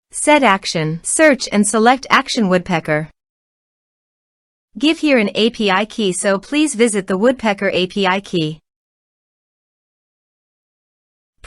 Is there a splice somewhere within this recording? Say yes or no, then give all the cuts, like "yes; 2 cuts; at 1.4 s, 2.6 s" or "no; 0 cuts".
yes; 1 cut; at 1.0 s